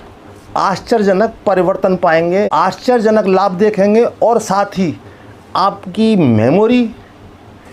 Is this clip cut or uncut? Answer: cut